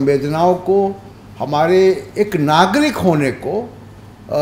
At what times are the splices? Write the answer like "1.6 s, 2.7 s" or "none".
none